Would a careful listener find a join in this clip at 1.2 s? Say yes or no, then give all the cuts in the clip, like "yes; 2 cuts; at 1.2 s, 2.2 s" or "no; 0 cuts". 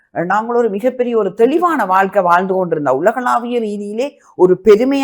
no; 0 cuts